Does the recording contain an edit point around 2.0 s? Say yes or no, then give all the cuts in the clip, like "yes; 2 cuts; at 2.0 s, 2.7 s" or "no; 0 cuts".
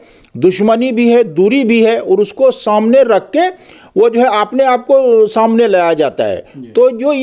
no; 0 cuts